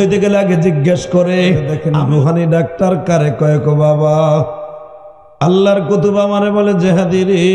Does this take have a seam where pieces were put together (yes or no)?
yes